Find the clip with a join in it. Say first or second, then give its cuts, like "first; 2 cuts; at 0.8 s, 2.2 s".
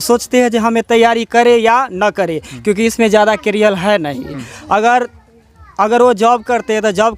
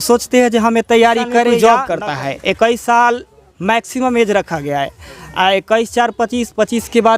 second; 1 cut; at 1.6 s